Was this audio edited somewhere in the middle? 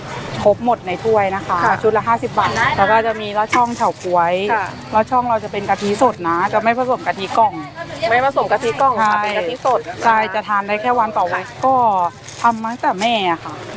yes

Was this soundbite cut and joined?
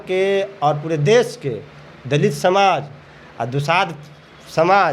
no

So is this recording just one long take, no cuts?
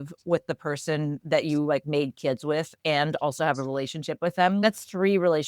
yes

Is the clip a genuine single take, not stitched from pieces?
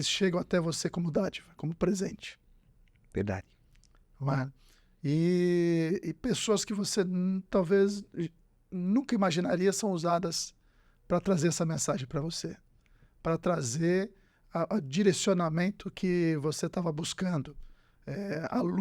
yes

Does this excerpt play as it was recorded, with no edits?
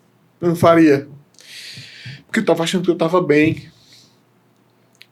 yes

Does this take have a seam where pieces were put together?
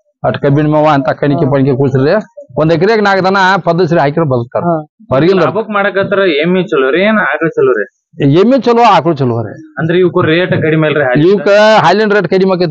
no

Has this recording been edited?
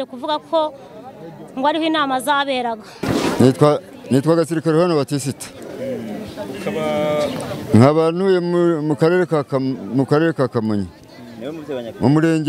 yes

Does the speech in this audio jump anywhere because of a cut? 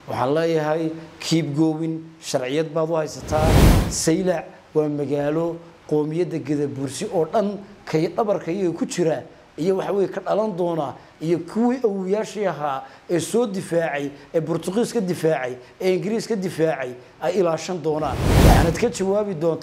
yes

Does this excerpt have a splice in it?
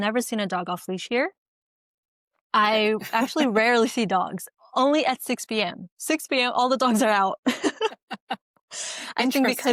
no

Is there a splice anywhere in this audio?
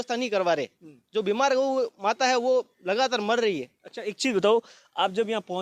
no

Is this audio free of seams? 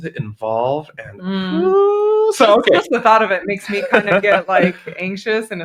yes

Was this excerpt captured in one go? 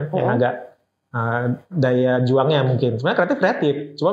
yes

